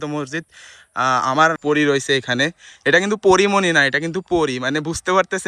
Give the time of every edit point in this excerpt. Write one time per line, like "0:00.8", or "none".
0:01.6